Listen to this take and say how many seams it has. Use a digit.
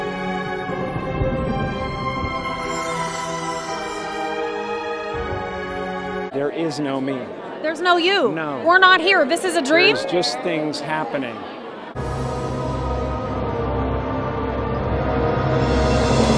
1